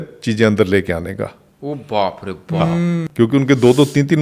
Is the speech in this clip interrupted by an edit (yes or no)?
yes